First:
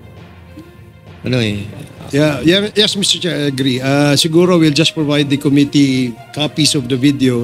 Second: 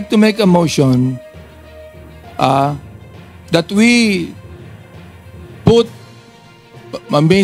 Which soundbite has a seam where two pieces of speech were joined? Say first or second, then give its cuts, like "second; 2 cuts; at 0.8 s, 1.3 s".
first; 1 cut; at 1.2 s